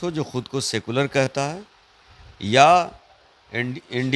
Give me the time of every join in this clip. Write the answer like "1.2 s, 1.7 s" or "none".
none